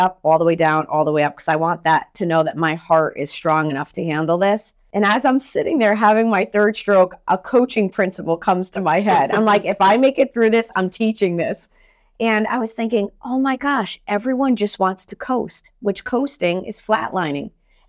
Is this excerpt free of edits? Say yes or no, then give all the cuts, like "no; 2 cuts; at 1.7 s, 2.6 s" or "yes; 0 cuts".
no; 1 cut; at 4.8 s